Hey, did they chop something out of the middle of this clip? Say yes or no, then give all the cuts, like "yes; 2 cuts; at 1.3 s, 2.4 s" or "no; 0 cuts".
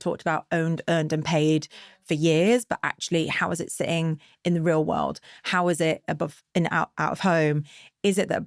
no; 0 cuts